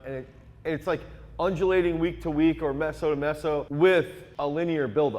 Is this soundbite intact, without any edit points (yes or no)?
no